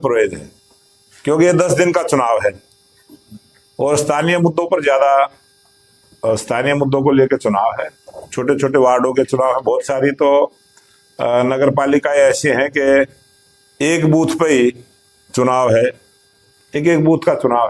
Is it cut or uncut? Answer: uncut